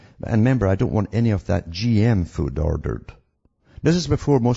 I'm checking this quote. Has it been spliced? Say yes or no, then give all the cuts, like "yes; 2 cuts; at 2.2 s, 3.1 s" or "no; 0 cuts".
yes; 1 cut; at 2.6 s